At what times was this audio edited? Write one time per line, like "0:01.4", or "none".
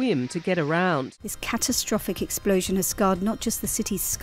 0:01.2